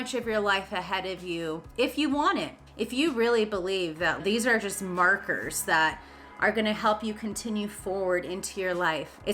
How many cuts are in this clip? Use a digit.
2